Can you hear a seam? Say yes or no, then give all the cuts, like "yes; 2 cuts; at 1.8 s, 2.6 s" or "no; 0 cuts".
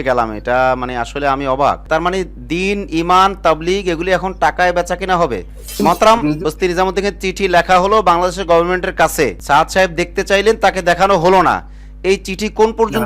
yes; 1 cut; at 5.7 s